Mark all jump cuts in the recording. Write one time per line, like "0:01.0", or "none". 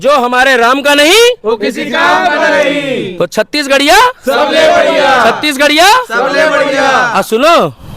0:01.1